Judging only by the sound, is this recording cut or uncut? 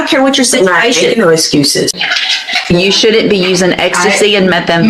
cut